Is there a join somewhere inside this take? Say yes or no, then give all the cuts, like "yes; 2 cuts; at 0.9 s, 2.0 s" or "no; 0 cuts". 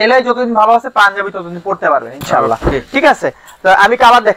no; 0 cuts